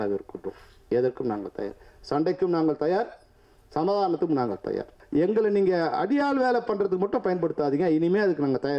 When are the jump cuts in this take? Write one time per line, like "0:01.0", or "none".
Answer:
0:05.0